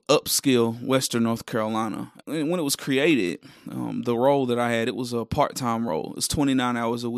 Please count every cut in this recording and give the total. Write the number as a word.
one